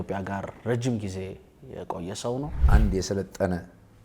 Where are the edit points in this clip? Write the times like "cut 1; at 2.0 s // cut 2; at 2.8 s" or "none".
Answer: cut 1; at 2.6 s